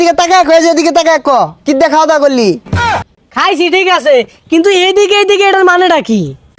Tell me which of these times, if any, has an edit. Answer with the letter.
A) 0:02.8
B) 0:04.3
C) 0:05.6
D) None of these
D